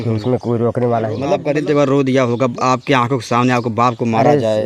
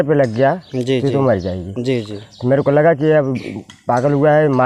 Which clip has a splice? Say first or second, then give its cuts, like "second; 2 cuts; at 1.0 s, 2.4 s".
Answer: first; 1 cut; at 1.3 s